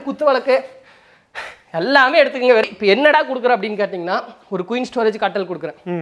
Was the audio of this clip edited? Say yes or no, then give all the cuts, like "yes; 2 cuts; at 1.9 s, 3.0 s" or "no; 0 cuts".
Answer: yes; 1 cut; at 2.6 s